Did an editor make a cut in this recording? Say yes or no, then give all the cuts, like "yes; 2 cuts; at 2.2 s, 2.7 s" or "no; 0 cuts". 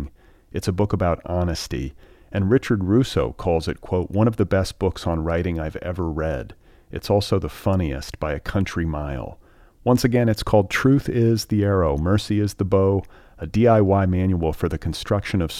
no; 0 cuts